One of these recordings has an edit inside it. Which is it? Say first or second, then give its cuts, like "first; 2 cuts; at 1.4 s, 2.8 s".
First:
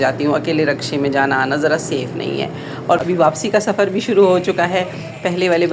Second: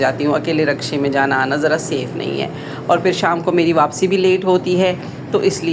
first; 1 cut; at 3.0 s